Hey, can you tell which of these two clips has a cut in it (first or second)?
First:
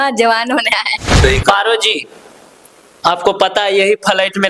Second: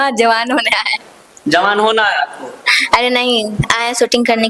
first